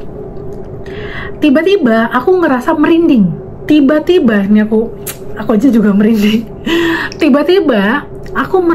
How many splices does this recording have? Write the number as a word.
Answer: one